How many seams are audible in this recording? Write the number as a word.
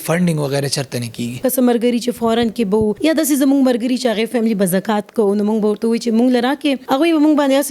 three